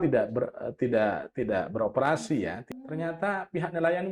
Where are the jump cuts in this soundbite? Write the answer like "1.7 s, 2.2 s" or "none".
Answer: 2.6 s